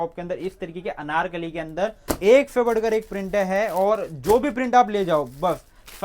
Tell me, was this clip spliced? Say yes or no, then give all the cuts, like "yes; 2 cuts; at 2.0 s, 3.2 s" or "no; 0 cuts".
yes; 1 cut; at 2.0 s